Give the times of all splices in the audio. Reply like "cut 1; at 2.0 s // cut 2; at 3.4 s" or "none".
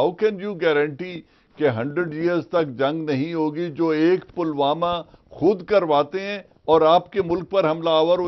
none